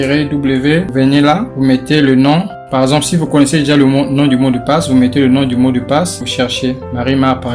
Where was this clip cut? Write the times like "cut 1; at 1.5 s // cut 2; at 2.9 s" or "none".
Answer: none